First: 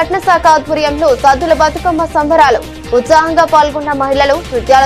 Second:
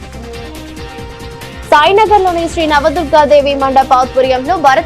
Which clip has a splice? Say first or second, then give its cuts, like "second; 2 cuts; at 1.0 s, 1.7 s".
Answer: second; 1 cut; at 1.1 s